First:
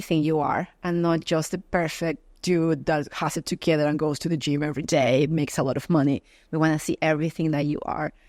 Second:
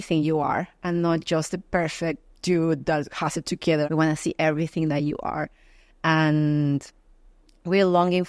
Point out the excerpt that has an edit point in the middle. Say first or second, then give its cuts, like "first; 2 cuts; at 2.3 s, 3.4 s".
second; 1 cut; at 3.9 s